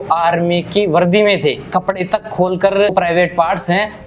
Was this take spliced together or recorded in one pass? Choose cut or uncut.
cut